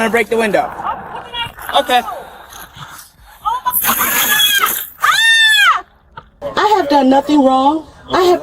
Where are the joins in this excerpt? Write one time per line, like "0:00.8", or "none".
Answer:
0:06.4